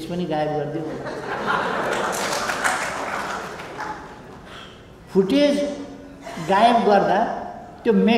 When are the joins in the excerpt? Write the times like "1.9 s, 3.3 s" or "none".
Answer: none

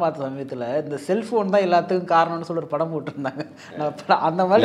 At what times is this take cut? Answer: none

